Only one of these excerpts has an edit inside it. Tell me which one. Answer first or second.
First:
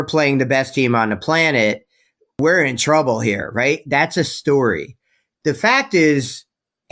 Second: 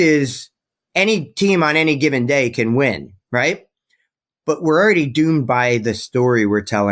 first